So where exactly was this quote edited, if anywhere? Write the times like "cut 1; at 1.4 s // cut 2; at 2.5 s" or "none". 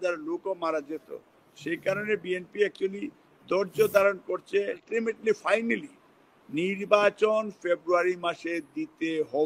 cut 1; at 4.9 s